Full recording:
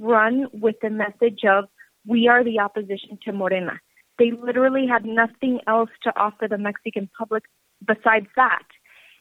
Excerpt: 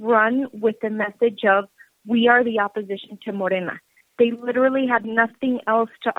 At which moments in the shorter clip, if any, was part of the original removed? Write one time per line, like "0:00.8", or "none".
none